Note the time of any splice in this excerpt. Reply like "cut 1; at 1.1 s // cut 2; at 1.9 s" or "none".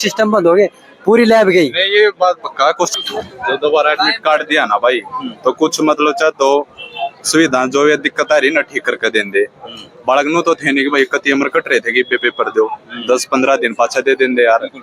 cut 1; at 2.9 s